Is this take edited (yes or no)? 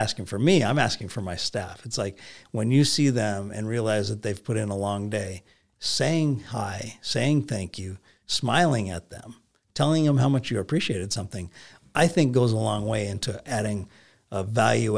no